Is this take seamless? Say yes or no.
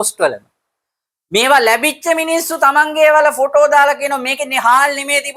yes